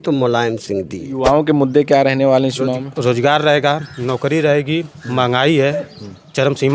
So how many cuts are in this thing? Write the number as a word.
one